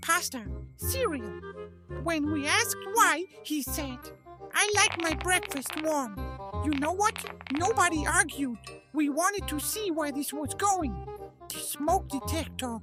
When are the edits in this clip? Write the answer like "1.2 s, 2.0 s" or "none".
none